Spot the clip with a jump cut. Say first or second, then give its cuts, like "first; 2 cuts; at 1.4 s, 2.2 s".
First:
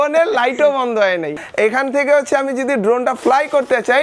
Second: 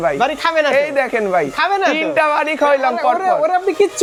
first; 1 cut; at 1.4 s